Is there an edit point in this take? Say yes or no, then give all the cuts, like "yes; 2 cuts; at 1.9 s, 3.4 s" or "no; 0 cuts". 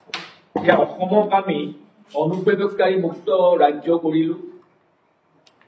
no; 0 cuts